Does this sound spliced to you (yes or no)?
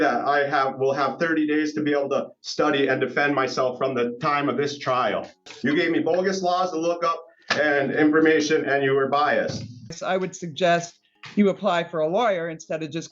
yes